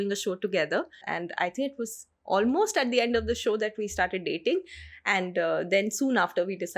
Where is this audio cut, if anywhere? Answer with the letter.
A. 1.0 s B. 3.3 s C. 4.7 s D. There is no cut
A